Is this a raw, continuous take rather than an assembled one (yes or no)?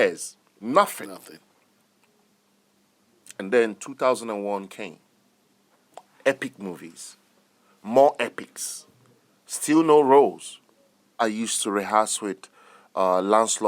no